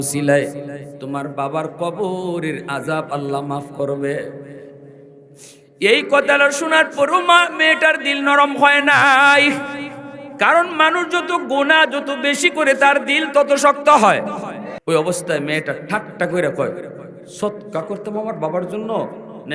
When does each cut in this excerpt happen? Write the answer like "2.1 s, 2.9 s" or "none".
14.7 s